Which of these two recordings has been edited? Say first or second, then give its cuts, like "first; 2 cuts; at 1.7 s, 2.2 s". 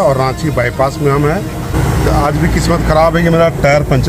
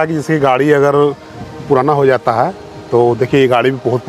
first; 1 cut; at 1.7 s